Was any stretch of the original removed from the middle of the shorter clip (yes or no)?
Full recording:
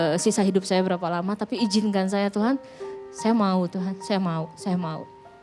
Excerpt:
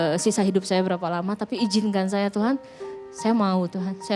no